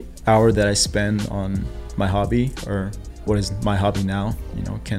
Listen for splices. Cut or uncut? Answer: uncut